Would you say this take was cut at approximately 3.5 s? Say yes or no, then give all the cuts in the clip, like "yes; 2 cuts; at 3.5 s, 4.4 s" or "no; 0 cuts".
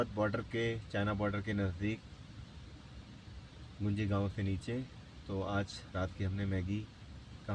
no; 0 cuts